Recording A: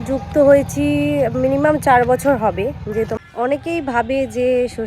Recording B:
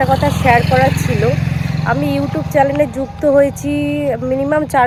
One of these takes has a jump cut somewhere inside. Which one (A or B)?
A